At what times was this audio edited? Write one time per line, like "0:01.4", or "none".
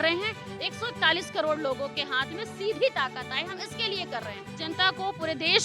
0:04.4